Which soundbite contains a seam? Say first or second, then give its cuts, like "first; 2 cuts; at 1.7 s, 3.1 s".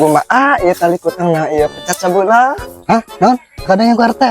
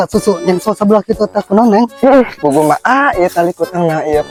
first; 1 cut; at 2.7 s